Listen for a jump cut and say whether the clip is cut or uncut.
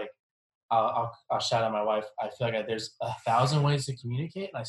cut